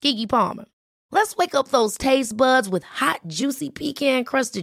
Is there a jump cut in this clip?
no; 0 cuts

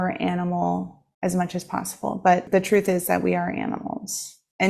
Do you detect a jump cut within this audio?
yes; 2 cuts; at 1.0 s, 2.5 s

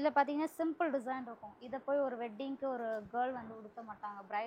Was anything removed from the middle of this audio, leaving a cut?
no; 0 cuts

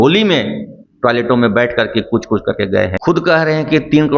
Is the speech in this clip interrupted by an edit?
yes; 1 cut; at 2.9 s

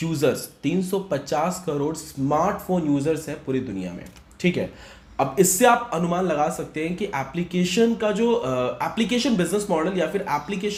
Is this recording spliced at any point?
no; 0 cuts

